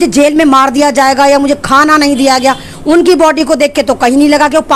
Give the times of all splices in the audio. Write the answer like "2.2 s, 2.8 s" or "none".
none